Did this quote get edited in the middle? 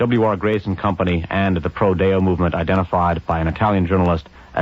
yes; 1 cut; at 1.2 s

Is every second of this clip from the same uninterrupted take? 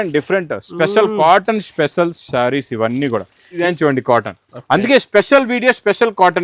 no; 1 cut; at 3.6 s

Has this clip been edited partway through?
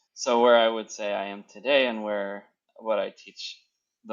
no; 0 cuts

